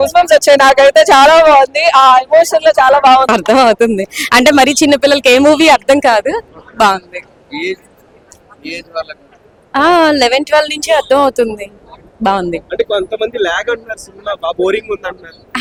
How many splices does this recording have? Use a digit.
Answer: 0